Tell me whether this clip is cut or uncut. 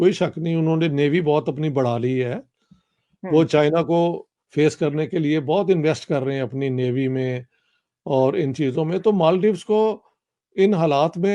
uncut